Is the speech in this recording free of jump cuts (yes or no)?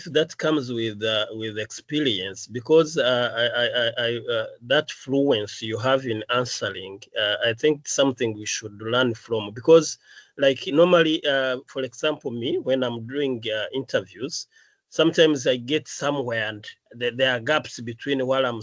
yes